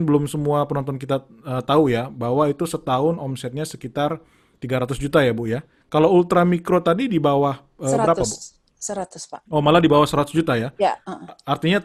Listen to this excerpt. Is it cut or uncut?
uncut